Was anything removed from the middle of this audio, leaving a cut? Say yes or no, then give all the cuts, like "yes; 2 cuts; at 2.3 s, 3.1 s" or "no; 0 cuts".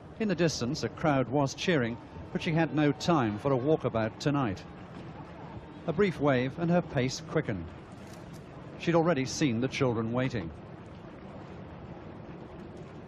yes; 1 cut; at 4.2 s